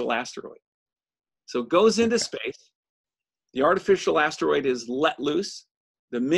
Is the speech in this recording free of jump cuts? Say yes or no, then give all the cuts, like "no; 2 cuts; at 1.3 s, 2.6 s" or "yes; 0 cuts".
yes; 0 cuts